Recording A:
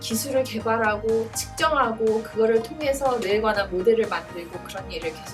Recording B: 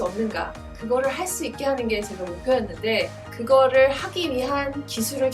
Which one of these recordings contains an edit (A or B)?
B